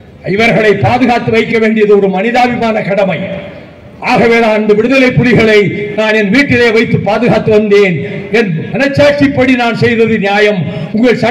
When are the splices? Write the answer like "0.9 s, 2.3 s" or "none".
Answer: none